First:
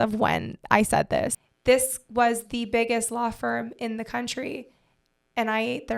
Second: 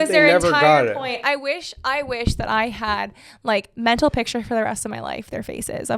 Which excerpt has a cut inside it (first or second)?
first